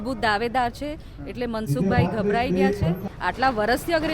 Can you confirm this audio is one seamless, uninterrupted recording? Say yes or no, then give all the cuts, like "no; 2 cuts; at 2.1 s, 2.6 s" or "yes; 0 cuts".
no; 1 cut; at 3.0 s